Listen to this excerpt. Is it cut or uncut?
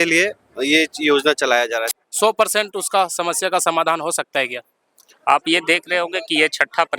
cut